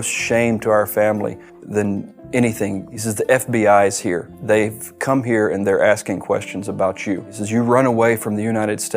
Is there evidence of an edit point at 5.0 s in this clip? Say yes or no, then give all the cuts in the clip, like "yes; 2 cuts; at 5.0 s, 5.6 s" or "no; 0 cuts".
no; 2 cuts; at 2.9 s, 7.3 s